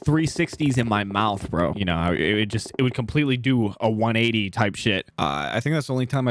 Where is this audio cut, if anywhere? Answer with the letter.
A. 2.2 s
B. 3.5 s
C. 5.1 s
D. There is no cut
C